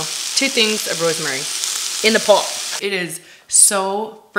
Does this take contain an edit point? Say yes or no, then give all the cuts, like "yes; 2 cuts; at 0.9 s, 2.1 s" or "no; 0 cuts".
yes; 1 cut; at 2.6 s